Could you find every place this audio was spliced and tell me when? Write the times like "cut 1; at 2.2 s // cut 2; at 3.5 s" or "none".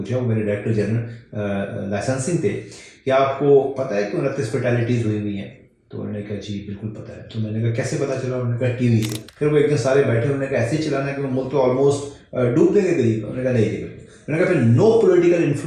cut 1; at 9.2 s